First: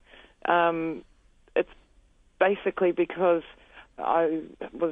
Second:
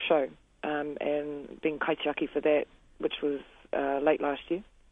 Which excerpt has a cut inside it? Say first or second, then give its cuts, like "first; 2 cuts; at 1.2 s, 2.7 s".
first; 1 cut; at 3.9 s